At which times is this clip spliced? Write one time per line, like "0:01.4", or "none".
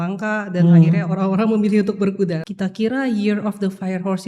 0:02.4